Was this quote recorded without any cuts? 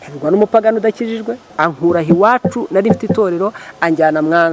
no; 1 cut; at 1.4 s

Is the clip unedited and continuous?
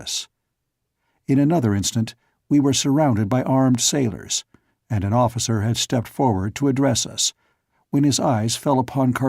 no; 1 cut; at 5.3 s

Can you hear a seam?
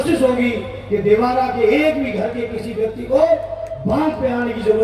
no; 0 cuts

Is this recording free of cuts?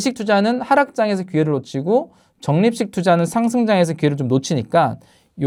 yes; 0 cuts

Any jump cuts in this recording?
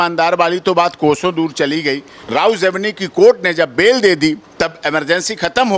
yes; 1 cut; at 2.1 s

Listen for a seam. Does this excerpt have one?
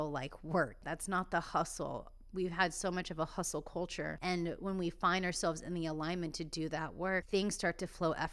yes; 3 cuts; at 0.9 s, 4.2 s, 7.3 s

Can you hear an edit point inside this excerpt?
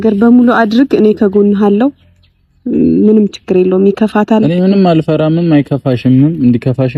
no; 0 cuts

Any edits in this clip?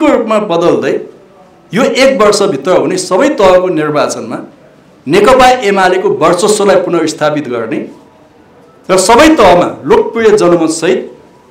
no; 0 cuts

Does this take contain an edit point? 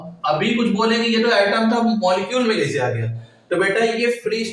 no; 0 cuts

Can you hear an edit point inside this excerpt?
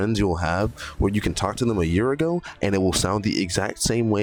no; 0 cuts

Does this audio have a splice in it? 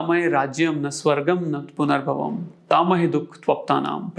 no; 0 cuts

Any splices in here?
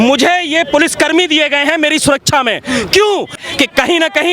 yes; 1 cut; at 3.4 s

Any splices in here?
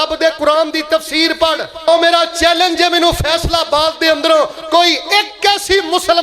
yes; 1 cut; at 1.9 s

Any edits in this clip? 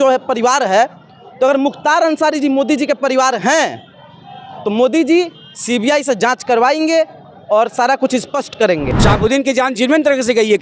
yes; 1 cut; at 8.9 s

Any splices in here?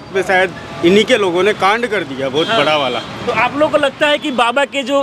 no; 0 cuts

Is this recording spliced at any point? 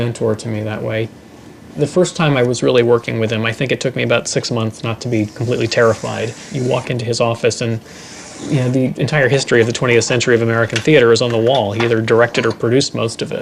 yes; 1 cut; at 4.6 s

